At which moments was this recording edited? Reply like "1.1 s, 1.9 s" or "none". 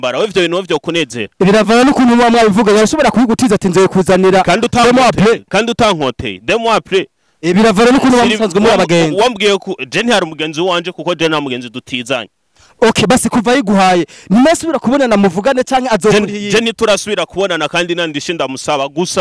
none